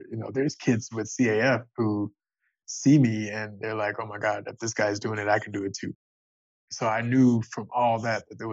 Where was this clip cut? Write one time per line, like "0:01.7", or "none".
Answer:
0:06.1